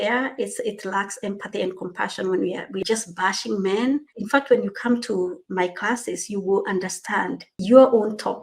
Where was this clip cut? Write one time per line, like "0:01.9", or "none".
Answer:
0:02.8
0:04.2
0:05.4
0:07.5